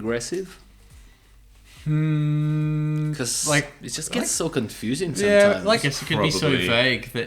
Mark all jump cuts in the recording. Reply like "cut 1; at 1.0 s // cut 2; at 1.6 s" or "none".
none